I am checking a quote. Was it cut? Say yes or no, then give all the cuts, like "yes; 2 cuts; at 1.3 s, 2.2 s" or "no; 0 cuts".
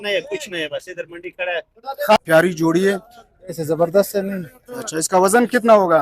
yes; 1 cut; at 2.2 s